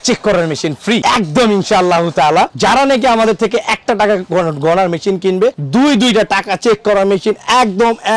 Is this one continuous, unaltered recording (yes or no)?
yes